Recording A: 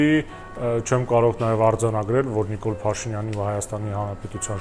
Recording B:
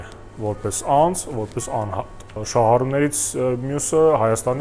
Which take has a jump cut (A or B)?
B